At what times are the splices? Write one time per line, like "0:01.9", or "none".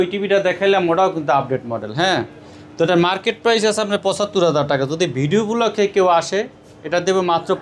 none